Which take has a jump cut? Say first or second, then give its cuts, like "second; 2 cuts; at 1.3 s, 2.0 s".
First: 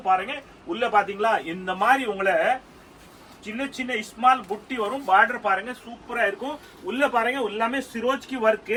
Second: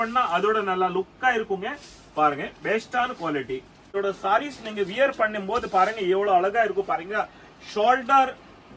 second; 1 cut; at 4.0 s